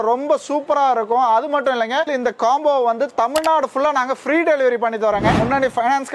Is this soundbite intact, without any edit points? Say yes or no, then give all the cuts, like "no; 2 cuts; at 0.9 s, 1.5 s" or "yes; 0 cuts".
no; 2 cuts; at 2.1 s, 5.4 s